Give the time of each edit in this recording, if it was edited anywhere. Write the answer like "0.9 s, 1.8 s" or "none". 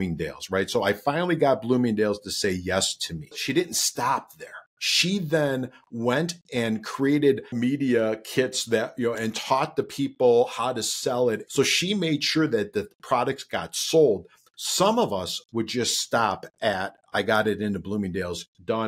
3.4 s, 7.5 s, 11.4 s